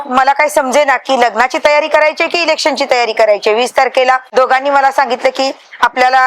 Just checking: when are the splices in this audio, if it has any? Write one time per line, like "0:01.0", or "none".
0:04.2